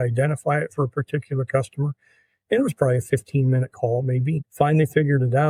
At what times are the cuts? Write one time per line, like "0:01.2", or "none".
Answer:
none